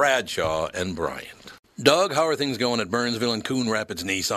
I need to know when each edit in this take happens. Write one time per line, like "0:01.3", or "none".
0:01.5